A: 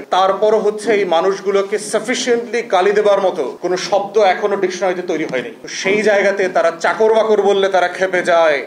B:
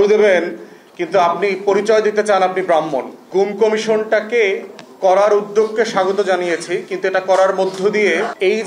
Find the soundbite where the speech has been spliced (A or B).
B